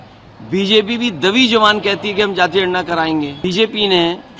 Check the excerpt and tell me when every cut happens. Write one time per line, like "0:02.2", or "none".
0:03.4